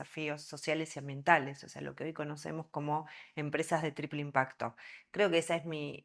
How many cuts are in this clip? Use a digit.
0